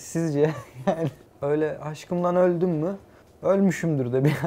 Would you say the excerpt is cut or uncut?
cut